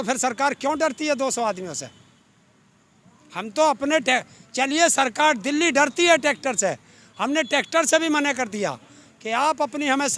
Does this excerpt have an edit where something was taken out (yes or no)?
no